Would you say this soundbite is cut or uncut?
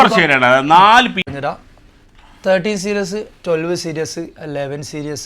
cut